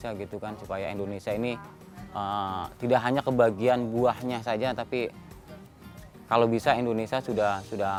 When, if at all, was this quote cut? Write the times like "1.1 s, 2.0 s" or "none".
none